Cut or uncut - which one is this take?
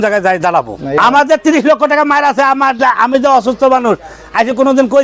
cut